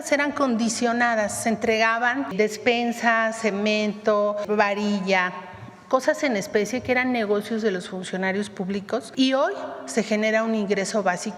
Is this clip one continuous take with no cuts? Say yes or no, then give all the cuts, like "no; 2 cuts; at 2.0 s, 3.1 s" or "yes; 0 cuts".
no; 3 cuts; at 2.3 s, 4.4 s, 9.1 s